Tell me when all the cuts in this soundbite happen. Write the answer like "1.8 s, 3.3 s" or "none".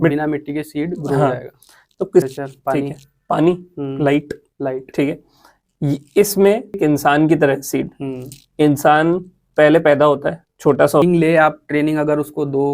2.2 s, 6.8 s, 11.0 s

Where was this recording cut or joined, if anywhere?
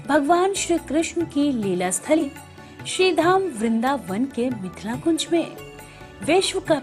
2.2 s

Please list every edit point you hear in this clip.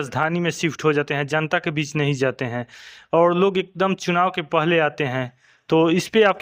none

